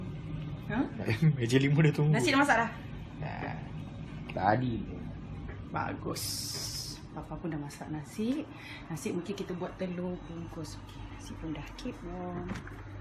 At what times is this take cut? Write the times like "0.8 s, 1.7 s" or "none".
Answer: 1.6 s